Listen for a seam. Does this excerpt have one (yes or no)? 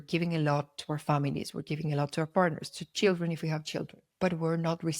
yes